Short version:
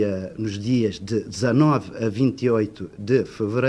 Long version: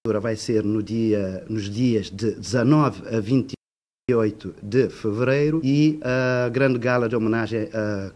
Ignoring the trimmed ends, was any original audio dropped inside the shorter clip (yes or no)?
yes